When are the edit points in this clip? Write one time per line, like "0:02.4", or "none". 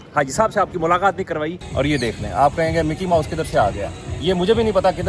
0:01.6